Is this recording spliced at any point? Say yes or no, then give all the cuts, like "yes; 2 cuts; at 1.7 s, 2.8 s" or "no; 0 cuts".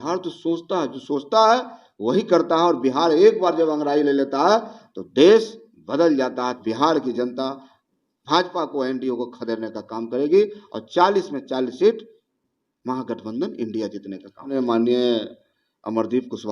yes; 2 cuts; at 6.6 s, 14.5 s